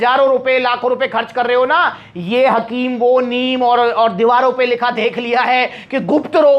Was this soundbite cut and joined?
no; 0 cuts

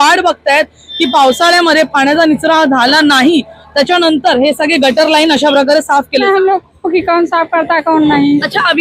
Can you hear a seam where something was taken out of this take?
yes; 1 cut; at 6.2 s

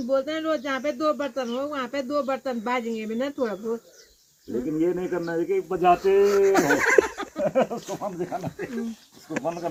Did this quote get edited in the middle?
no; 0 cuts

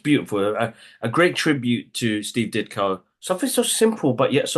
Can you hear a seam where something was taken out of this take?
yes; 1 cut; at 3.1 s

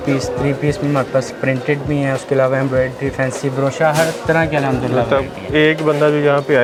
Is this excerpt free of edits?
yes; 0 cuts

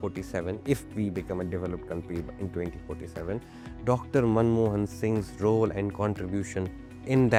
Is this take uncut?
yes; 0 cuts

